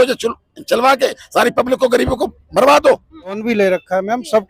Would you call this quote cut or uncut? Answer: cut